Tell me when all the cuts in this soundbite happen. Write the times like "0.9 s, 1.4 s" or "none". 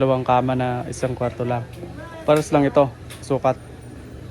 none